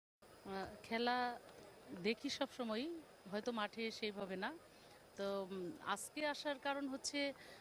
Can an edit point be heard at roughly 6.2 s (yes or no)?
yes